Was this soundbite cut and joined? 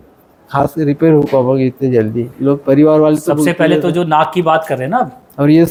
no; 0 cuts

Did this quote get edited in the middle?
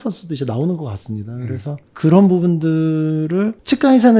no; 0 cuts

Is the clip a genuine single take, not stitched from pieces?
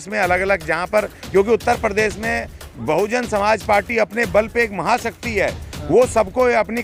yes; 0 cuts

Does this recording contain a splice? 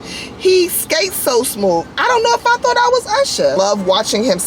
yes; 1 cut; at 3.6 s

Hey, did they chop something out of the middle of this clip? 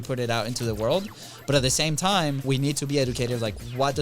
yes; 1 cut; at 2.4 s

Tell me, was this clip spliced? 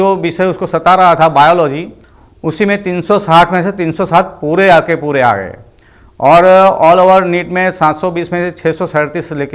no; 0 cuts

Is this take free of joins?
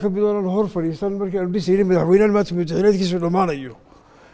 yes; 0 cuts

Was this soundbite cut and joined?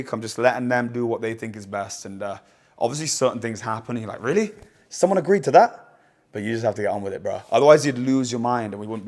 no; 0 cuts

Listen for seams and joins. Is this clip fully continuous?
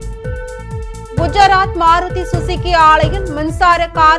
no; 1 cut; at 1.1 s

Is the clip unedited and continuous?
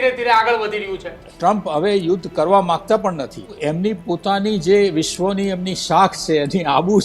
no; 2 cuts; at 1.2 s, 3.5 s

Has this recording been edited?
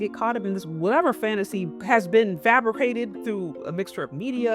yes; 1 cut; at 1.7 s

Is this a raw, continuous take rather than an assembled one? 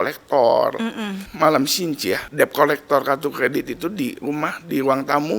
no; 2 cuts; at 1.2 s, 2.3 s

